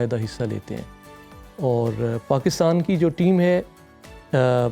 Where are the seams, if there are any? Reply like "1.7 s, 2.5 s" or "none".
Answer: none